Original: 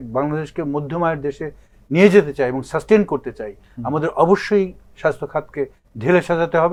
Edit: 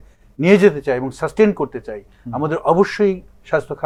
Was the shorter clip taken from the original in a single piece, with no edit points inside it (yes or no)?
yes